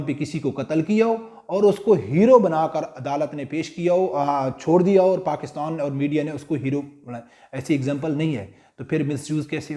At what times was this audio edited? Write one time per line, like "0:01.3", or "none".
none